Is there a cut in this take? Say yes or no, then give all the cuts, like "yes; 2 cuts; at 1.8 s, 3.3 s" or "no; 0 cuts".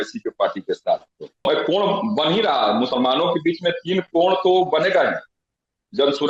yes; 1 cut; at 1.4 s